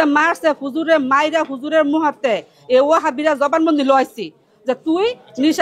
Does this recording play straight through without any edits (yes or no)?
yes